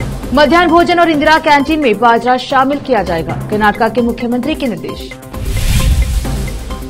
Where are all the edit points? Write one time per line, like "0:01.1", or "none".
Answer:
none